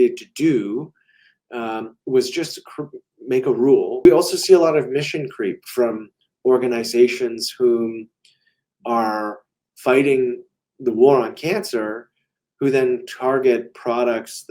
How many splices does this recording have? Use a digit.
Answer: 1